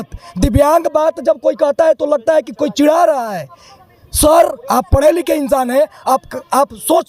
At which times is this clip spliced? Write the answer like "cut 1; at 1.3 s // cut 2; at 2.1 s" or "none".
none